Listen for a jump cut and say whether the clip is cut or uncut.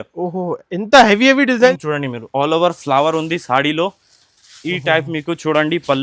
cut